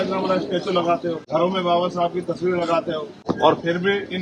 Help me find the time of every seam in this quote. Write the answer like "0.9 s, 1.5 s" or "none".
1.2 s, 3.2 s

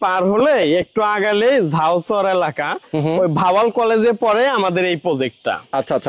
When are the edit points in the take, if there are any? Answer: none

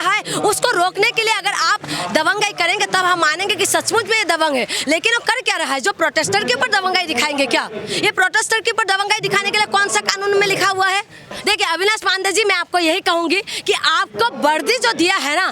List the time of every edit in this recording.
11.3 s

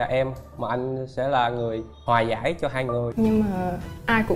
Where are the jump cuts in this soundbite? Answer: 3.1 s

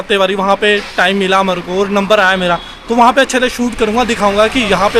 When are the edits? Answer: none

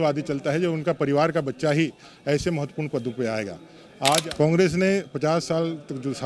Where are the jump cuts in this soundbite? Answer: 4.2 s

